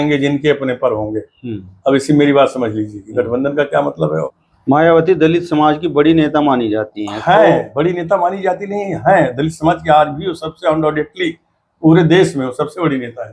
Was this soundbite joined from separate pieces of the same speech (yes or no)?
yes